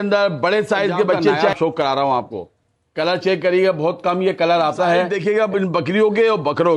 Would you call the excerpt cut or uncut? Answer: cut